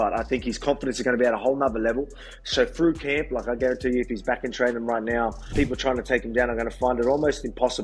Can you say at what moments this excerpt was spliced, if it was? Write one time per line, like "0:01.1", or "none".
none